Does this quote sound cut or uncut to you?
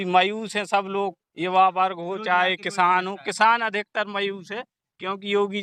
uncut